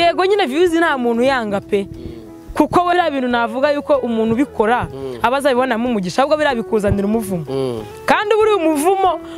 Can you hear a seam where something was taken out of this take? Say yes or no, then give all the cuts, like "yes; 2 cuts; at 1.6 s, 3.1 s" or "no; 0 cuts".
yes; 1 cut; at 2.9 s